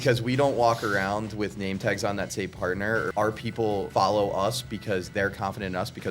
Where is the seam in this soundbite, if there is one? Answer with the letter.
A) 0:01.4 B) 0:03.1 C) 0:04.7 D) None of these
B